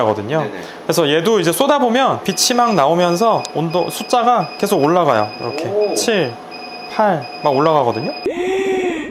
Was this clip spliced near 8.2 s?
yes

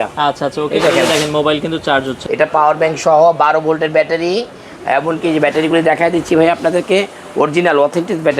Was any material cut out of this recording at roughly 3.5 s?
no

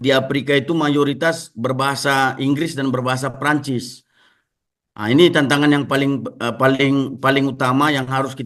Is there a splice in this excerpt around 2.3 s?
no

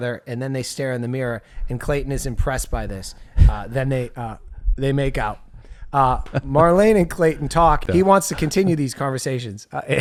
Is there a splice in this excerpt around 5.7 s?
no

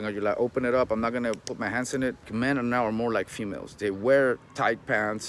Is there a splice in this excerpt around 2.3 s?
yes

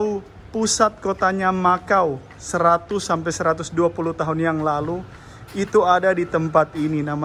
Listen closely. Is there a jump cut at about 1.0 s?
no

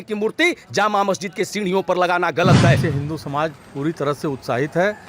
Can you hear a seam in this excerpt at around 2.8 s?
yes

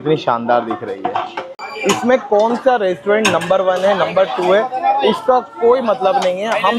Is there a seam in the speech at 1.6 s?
yes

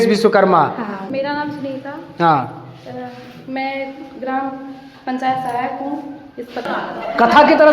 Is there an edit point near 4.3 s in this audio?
no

